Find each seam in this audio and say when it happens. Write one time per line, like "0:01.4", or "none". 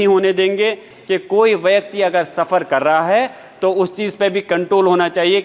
0:00.9